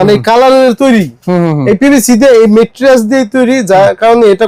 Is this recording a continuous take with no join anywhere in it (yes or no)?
yes